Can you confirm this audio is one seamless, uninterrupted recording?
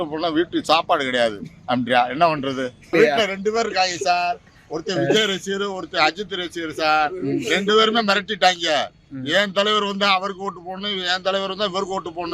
yes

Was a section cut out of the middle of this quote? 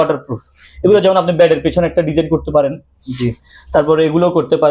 no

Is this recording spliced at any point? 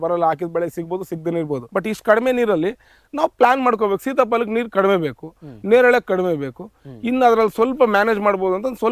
yes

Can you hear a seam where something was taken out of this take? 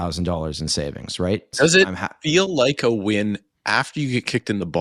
yes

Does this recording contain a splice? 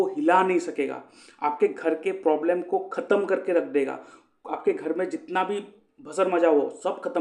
no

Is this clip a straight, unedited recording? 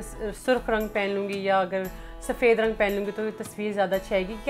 yes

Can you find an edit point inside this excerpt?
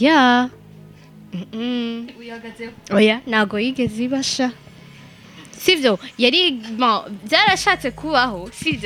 no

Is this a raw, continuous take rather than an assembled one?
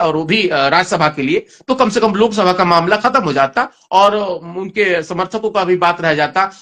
yes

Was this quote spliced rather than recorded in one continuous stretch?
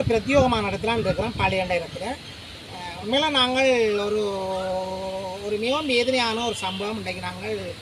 no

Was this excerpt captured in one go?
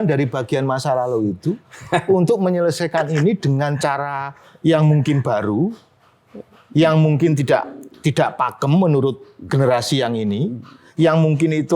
yes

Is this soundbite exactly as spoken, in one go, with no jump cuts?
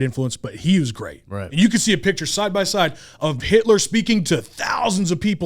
no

